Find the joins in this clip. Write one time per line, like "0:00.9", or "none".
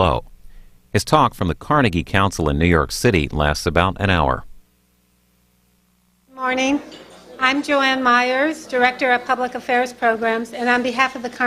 none